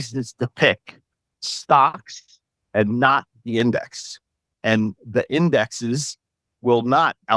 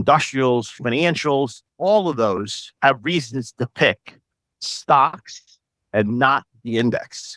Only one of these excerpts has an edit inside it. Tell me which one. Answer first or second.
second